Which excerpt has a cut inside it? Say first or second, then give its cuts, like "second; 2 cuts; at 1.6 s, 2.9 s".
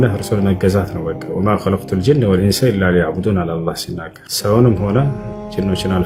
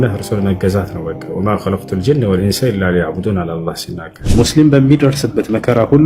second; 1 cut; at 4.2 s